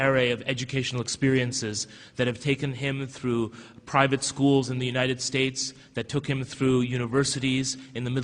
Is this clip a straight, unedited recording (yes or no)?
yes